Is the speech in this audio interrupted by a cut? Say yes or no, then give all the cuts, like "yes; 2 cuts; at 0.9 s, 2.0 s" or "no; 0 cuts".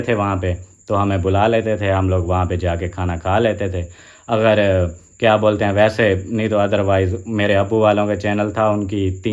no; 0 cuts